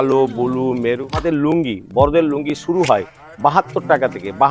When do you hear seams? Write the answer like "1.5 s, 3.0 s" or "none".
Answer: 1.2 s